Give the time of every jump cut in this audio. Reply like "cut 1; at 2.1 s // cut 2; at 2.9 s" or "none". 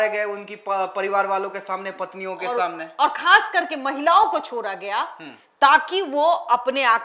none

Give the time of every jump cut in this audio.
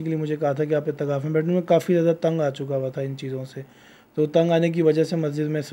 none

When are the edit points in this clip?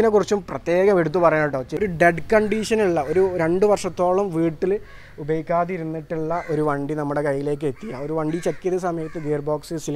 cut 1; at 1.7 s

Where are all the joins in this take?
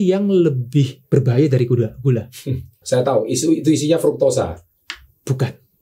cut 1; at 1.0 s // cut 2; at 2.8 s

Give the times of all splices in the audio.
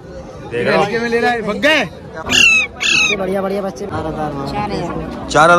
cut 1; at 2.3 s // cut 2; at 3.9 s

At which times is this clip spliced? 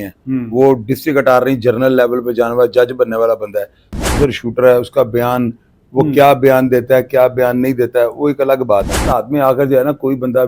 cut 1; at 4.1 s // cut 2; at 9.1 s

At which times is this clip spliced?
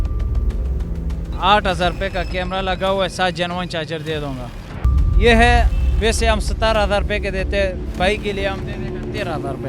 cut 1; at 4.8 s

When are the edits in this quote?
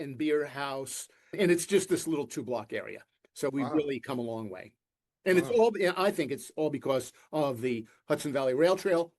cut 1; at 1.4 s

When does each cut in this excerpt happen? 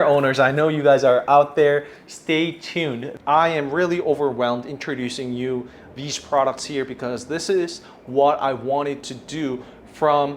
cut 1; at 3.1 s

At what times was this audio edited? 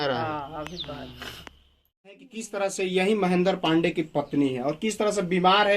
cut 1; at 2.3 s

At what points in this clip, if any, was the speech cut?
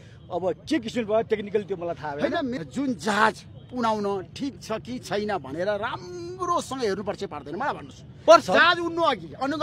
cut 1; at 2.6 s

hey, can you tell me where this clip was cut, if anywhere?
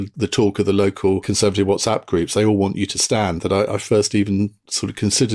cut 1; at 1.3 s

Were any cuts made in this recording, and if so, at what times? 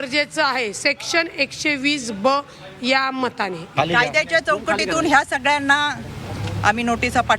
cut 1; at 3.7 s

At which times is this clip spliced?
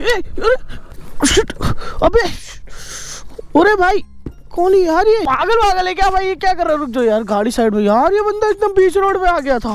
none

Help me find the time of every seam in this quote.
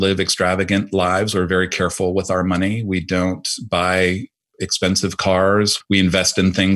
none

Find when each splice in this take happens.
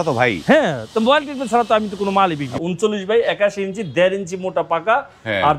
cut 1; at 2.5 s

